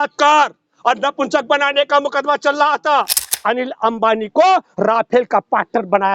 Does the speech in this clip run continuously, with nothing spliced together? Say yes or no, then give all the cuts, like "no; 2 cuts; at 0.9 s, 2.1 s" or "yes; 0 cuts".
no; 1 cut; at 3.2 s